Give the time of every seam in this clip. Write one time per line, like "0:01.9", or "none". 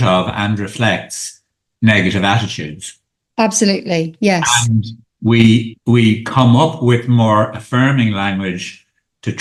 none